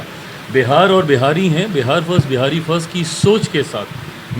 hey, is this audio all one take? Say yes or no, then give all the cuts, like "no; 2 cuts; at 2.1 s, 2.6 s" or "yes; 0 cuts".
yes; 0 cuts